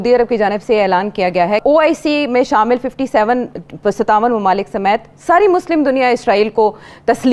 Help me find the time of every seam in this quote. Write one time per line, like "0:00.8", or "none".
0:01.6